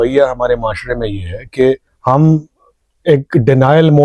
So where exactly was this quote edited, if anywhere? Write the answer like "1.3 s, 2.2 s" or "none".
1.9 s